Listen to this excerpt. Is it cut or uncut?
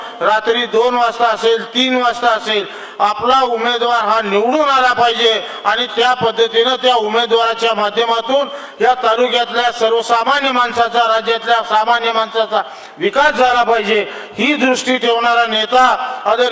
uncut